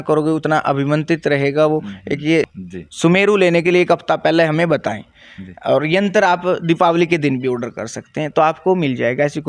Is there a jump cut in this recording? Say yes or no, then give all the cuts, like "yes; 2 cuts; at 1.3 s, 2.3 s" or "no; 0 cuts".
yes; 1 cut; at 2.5 s